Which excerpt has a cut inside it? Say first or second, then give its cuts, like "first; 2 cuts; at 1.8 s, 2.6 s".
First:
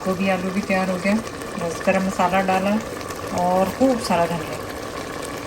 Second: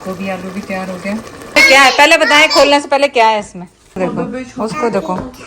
second; 2 cuts; at 1.6 s, 4.0 s